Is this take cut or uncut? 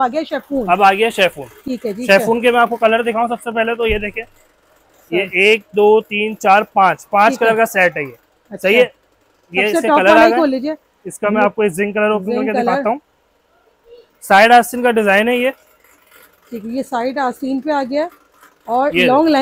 uncut